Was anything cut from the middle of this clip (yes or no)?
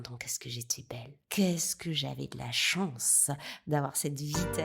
yes